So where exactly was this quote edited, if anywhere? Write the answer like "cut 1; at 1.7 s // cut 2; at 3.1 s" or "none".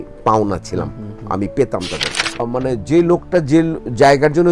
cut 1; at 2.4 s